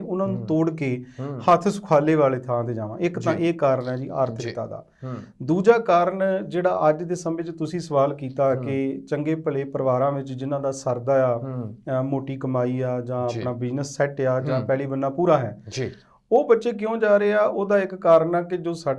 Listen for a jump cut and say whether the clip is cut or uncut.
uncut